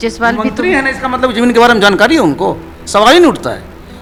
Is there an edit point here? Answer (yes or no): no